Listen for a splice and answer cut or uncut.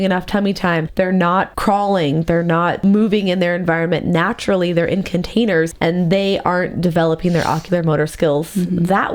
cut